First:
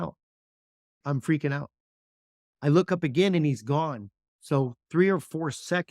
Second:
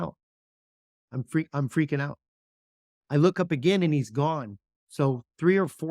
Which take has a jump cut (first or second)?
first